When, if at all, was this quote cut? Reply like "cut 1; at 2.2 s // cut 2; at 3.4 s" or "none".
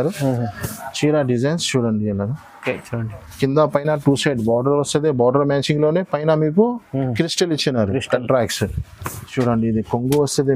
cut 1; at 9.3 s